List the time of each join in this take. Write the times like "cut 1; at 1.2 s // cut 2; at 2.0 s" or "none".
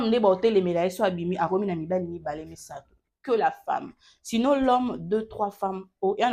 none